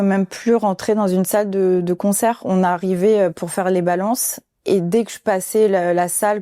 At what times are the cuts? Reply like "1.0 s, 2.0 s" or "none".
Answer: none